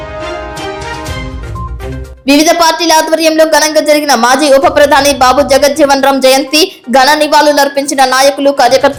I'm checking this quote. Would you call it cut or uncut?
uncut